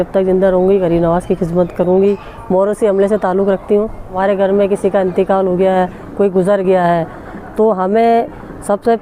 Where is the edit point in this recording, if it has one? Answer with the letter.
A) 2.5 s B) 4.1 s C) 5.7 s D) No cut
B